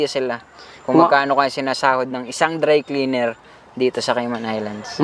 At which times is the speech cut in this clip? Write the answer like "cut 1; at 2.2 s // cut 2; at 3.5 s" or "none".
none